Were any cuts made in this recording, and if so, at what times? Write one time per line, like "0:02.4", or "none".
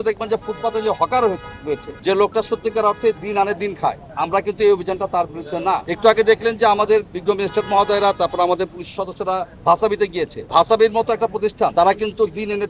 0:01.9
0:04.1
0:05.9
0:10.4
0:11.7